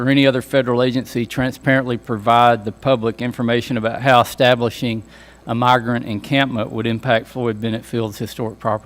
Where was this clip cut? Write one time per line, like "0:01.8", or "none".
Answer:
none